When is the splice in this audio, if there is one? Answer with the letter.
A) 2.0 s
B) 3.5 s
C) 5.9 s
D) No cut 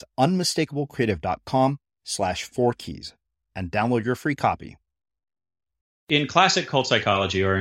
C